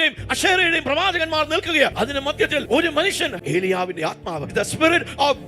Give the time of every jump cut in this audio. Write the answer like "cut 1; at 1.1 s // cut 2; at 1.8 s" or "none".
cut 1; at 2.4 s // cut 2; at 4.4 s